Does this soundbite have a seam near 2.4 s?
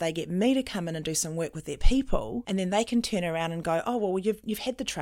yes; 1 cut; at 2.4 s

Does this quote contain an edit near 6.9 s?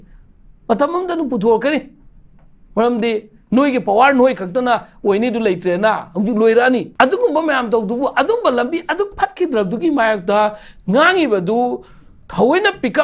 yes; 1 cut; at 6.9 s

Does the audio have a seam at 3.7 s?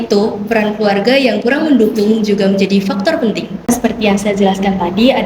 yes; 1 cut; at 3.7 s

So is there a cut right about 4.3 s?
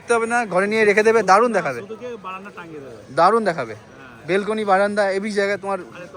no; 0 cuts

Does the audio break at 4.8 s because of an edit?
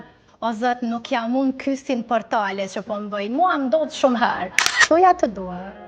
yes; 1 cut; at 4.8 s

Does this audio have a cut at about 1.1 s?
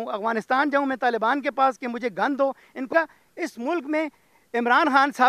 no; 1 cut; at 2.9 s

